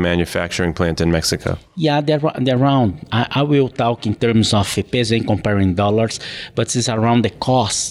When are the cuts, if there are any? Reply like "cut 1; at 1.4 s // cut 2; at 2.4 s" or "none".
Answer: cut 1; at 4.7 s